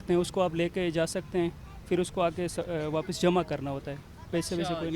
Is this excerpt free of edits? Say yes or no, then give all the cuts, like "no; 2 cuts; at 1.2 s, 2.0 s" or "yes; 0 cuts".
yes; 0 cuts